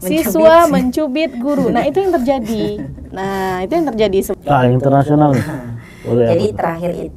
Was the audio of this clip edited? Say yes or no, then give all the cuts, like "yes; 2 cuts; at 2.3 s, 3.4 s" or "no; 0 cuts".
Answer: yes; 1 cut; at 4.3 s